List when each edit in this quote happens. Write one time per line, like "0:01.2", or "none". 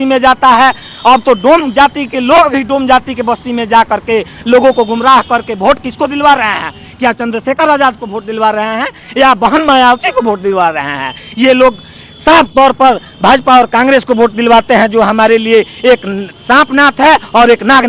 none